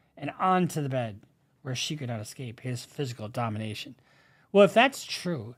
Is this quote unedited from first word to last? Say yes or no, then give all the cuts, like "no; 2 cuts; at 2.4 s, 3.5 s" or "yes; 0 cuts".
yes; 0 cuts